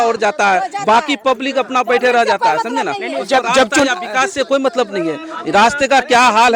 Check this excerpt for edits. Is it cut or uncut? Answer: uncut